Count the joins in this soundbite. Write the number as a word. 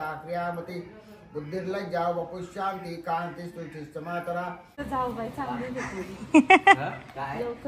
one